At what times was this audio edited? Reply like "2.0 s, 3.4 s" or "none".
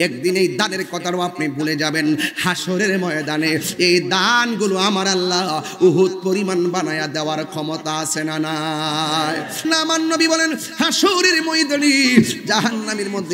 9.6 s